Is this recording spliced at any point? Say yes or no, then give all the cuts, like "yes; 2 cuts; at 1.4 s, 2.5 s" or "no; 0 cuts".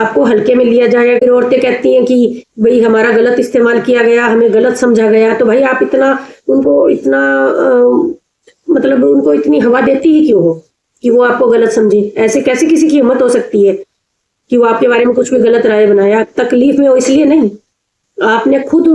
yes; 1 cut; at 1.2 s